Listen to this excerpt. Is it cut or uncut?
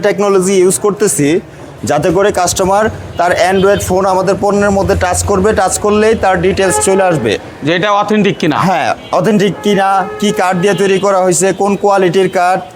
uncut